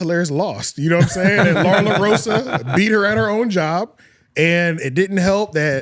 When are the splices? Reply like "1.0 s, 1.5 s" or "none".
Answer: none